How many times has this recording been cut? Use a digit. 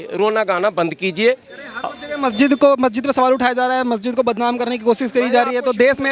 0